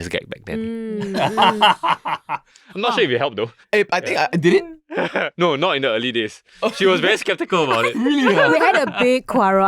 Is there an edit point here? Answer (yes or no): no